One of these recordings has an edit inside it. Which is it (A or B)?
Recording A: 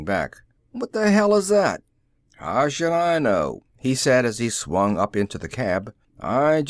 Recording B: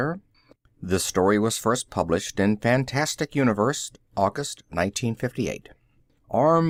A